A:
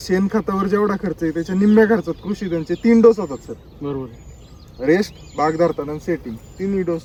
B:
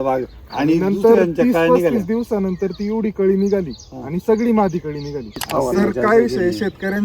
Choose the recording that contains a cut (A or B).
B